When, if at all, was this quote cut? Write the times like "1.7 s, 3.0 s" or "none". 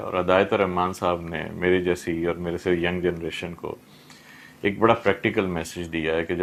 none